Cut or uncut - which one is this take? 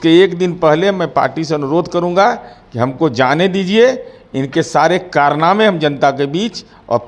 uncut